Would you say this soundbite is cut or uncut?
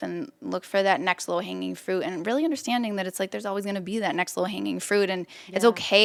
uncut